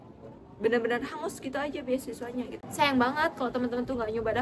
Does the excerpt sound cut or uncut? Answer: cut